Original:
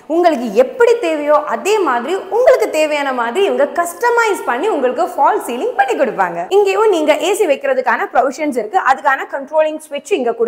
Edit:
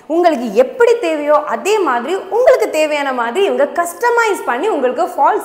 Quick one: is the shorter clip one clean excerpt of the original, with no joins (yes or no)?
yes